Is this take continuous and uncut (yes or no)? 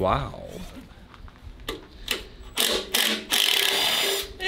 no